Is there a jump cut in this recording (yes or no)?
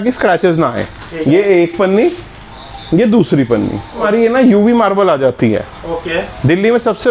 yes